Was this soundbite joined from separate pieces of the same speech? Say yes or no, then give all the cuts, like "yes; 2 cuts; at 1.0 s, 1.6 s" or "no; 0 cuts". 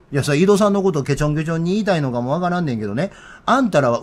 no; 0 cuts